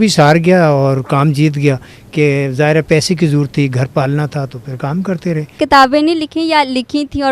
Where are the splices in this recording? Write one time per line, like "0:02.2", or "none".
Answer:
0:05.6